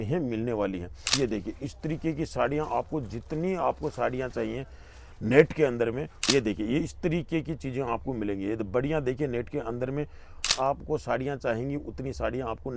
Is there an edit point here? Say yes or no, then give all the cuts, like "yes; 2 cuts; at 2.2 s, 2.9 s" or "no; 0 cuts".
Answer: yes; 3 cuts; at 1.0 s, 6.2 s, 10.5 s